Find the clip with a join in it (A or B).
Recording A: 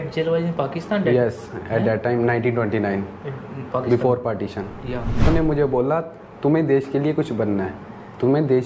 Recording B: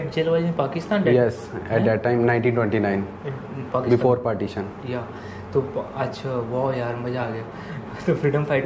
A